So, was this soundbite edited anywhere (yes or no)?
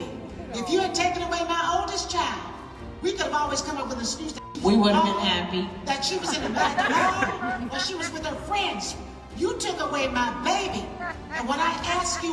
no